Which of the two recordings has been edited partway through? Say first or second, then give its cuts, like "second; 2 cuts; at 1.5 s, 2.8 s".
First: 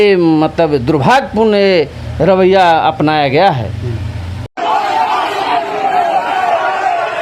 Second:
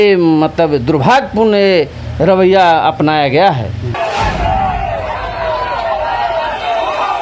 second; 1 cut; at 3.9 s